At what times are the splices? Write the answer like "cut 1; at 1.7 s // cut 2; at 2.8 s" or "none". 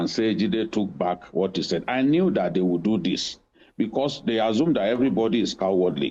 none